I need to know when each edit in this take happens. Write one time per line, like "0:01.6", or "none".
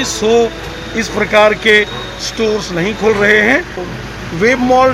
0:03.9